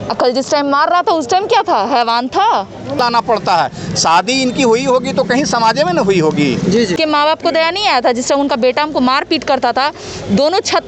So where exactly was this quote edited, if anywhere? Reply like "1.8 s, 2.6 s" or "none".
3.0 s, 7.0 s